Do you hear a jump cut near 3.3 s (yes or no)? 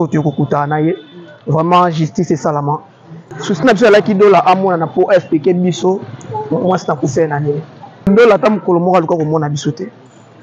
yes